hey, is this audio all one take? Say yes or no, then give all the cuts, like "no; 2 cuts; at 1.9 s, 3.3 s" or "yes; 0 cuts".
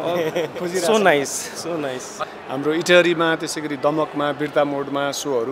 no; 1 cut; at 2.2 s